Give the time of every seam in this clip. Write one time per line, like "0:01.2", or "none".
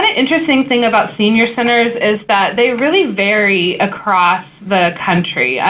none